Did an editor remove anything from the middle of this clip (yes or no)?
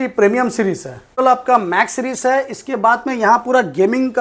yes